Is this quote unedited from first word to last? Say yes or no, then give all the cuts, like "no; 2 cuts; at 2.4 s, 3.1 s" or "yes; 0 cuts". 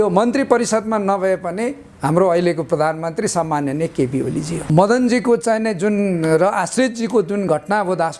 no; 1 cut; at 4.6 s